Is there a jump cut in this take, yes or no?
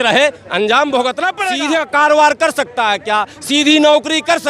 yes